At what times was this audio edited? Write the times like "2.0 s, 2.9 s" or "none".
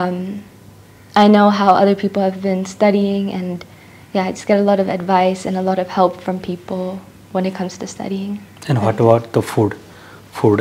none